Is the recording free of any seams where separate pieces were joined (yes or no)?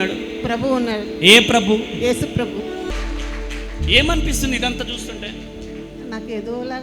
no